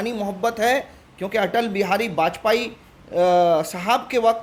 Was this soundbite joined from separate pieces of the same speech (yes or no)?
no